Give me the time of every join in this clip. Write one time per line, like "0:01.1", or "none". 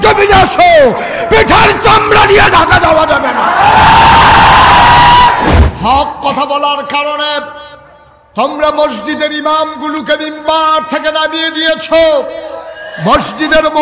0:05.6